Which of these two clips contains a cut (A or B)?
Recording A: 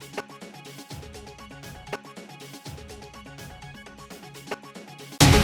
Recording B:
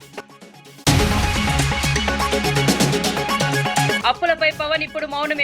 B